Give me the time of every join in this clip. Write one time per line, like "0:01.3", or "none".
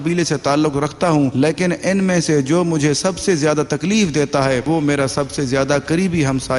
0:01.3
0:04.6